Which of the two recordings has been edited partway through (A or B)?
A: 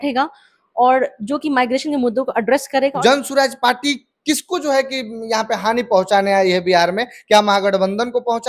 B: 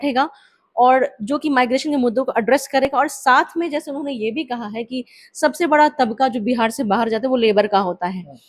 A